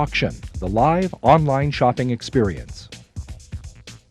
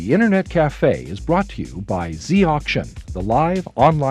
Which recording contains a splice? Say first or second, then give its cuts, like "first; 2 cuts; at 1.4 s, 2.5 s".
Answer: first; 1 cut; at 2.6 s